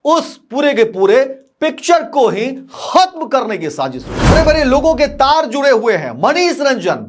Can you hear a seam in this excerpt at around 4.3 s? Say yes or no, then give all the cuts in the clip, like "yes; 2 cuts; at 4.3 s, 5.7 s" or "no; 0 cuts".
yes; 1 cut; at 4.3 s